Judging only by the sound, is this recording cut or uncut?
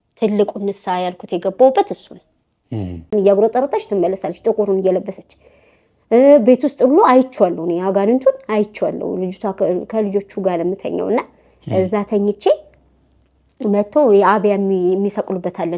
cut